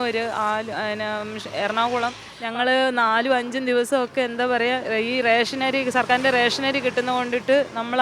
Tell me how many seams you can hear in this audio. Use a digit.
1